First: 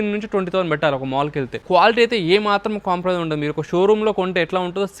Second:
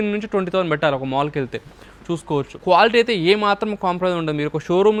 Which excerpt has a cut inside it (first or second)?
first